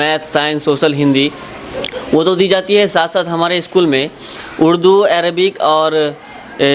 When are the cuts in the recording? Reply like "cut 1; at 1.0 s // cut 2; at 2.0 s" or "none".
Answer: none